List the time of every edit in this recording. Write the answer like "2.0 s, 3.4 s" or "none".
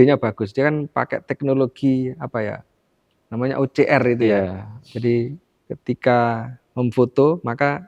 none